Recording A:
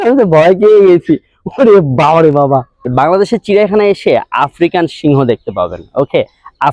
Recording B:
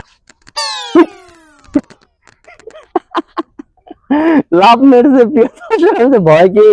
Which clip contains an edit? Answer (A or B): A